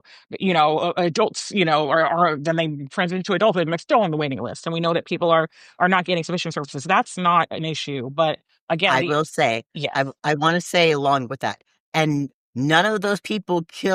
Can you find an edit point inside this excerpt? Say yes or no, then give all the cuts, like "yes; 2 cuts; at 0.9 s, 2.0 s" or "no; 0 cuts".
no; 0 cuts